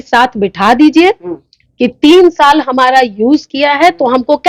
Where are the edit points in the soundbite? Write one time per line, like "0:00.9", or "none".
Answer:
none